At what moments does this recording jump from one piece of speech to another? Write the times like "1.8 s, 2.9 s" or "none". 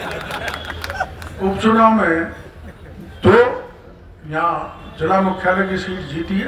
none